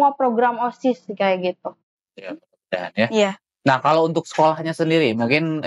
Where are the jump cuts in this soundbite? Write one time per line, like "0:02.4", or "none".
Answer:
none